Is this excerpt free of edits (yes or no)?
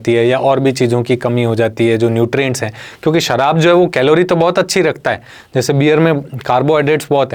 yes